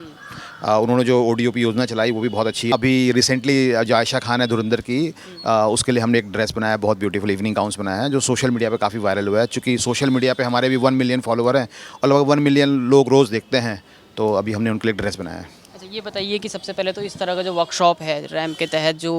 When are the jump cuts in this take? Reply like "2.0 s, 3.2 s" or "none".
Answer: 2.7 s

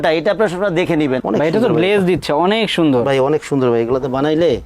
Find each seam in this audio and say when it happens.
1.2 s

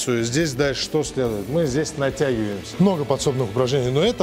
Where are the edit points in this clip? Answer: 2.6 s

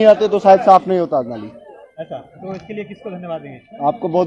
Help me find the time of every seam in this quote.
none

